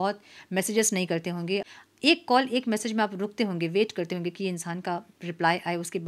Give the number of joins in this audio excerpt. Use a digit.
1